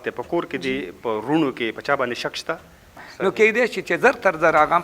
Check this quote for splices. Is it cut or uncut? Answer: cut